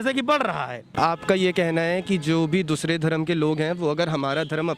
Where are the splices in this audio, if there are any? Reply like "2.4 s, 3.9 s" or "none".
0.9 s

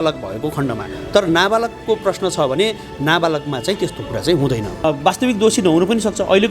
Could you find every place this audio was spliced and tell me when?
4.8 s

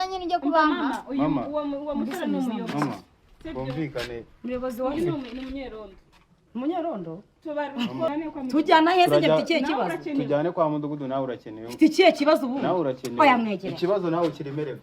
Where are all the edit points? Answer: 8.1 s

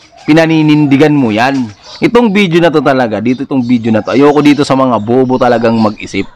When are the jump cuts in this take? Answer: 1.8 s

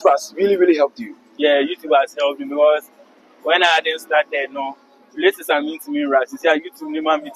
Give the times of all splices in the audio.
none

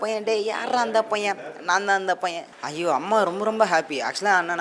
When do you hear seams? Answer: 2.5 s

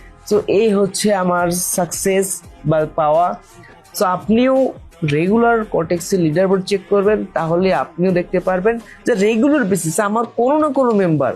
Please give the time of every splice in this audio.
none

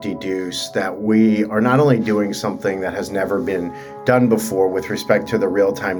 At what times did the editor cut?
none

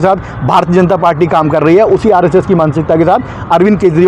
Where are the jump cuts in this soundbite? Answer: none

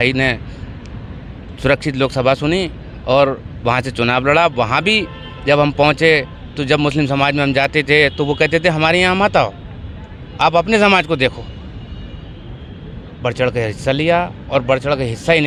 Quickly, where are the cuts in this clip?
none

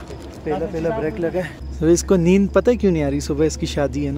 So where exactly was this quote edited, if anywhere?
1.6 s

